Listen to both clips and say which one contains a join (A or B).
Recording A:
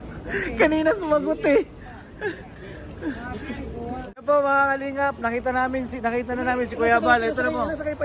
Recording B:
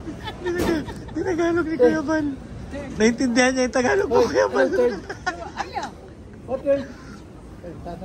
A